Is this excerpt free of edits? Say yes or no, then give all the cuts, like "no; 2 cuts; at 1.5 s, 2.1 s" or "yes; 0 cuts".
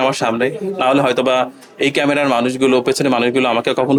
yes; 0 cuts